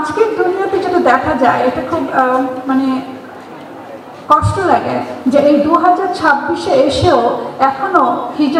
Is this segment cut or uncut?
uncut